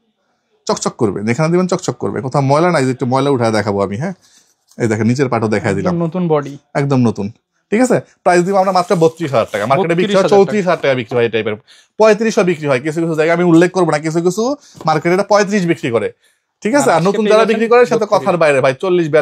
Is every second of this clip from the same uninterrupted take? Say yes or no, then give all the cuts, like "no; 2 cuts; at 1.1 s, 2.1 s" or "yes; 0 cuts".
yes; 0 cuts